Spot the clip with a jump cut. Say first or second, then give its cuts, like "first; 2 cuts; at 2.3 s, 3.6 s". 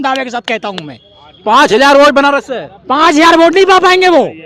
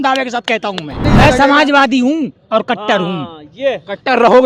second; 1 cut; at 1.0 s